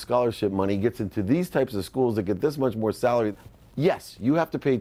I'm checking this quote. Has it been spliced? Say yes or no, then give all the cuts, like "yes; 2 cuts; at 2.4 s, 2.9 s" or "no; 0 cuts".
yes; 1 cut; at 3.3 s